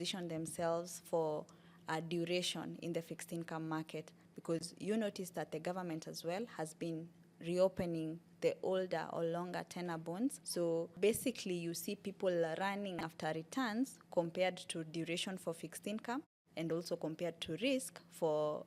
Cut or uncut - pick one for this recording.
uncut